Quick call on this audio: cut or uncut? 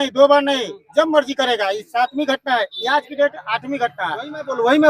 uncut